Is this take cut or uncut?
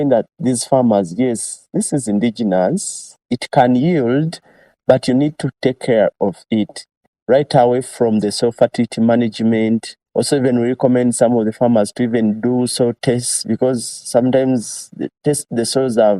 cut